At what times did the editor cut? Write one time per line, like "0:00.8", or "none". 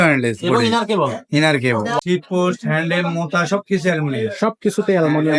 0:02.0